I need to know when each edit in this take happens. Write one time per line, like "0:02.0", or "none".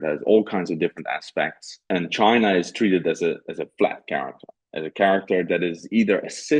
0:01.9

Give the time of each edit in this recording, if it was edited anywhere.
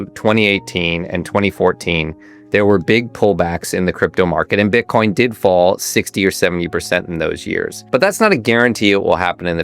0:07.8

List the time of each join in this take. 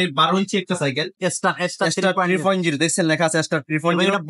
0:01.2

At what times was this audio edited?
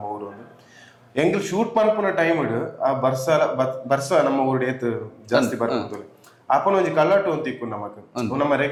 none

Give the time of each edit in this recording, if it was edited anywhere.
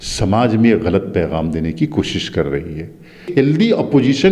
0:03.3

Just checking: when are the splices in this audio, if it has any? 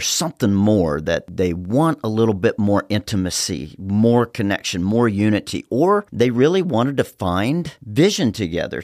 0:01.3

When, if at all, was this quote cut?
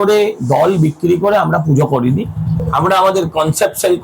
0:02.6

